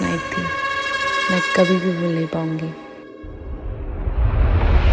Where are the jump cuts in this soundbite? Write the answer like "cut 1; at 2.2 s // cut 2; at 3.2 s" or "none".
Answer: none